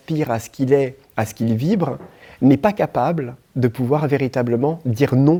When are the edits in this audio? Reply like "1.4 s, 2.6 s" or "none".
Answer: none